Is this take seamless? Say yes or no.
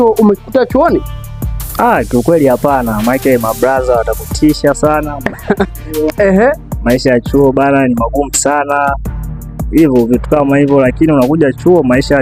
yes